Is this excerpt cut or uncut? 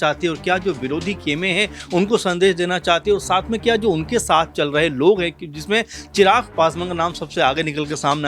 uncut